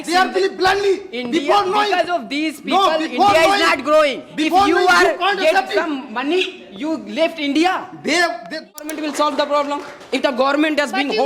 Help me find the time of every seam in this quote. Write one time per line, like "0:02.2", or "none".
0:08.9